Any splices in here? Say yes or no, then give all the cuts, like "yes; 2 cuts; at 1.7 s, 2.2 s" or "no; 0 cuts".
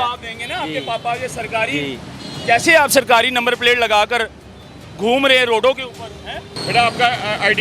yes; 1 cut; at 6.5 s